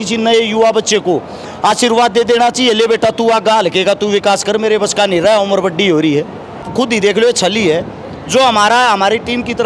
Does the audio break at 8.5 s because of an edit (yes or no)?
no